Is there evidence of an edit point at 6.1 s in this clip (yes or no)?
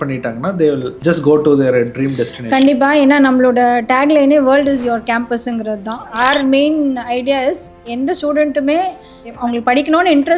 yes